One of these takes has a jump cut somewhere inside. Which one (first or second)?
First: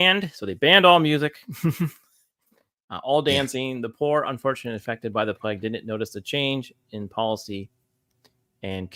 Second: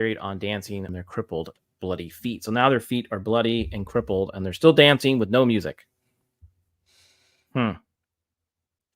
second